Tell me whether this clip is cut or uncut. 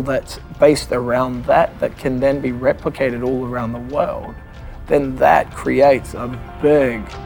uncut